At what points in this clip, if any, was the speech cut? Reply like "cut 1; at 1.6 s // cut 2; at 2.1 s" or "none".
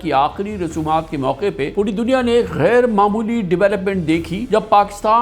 cut 1; at 1.7 s // cut 2; at 4.4 s